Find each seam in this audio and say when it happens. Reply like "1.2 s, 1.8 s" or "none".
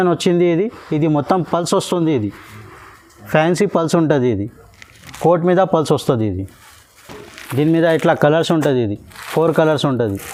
none